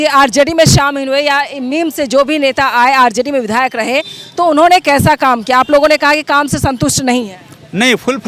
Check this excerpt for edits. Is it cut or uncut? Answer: uncut